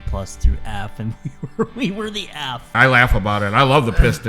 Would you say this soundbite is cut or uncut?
cut